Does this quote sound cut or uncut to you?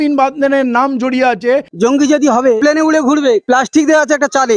cut